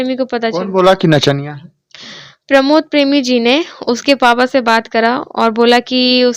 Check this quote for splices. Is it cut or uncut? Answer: uncut